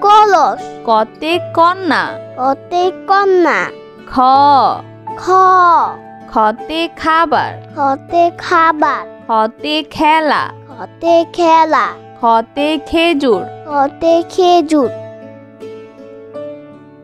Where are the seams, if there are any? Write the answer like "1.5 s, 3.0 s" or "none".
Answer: none